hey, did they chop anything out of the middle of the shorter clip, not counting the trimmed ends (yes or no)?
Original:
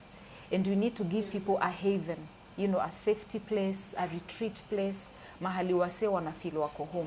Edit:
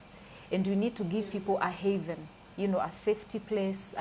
no